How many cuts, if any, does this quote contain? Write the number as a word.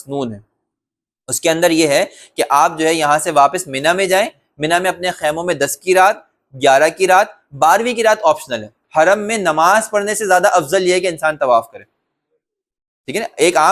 one